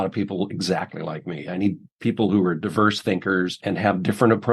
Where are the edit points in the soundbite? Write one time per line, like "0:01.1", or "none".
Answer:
0:03.6

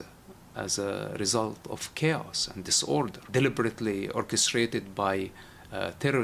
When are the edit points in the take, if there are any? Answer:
0:03.2

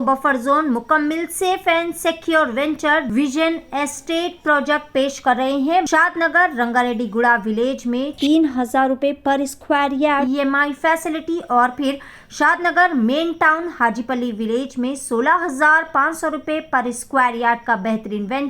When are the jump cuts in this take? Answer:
0:03.1
0:05.9

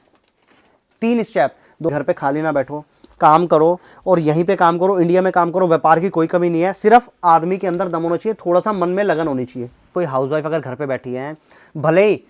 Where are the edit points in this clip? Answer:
0:01.9
0:09.9

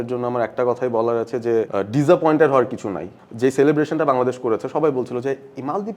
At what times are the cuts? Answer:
0:01.7
0:03.1

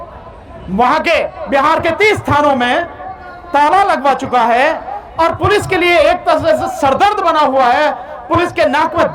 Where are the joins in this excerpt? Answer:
none

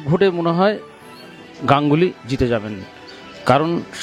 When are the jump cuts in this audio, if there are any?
none

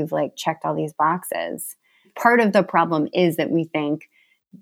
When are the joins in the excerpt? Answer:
0:02.0

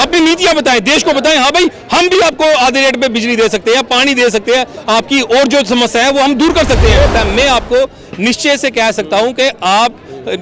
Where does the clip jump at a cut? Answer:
0:07.1

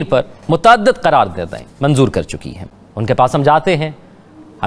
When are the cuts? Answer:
none

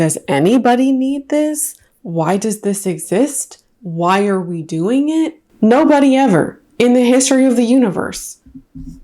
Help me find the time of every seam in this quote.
0:05.4

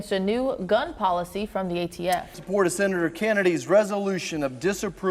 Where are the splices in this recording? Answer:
0:02.4

